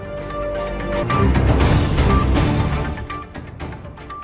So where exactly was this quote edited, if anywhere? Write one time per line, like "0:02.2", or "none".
0:01.0